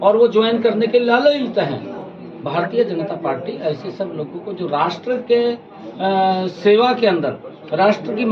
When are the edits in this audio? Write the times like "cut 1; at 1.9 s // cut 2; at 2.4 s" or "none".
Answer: none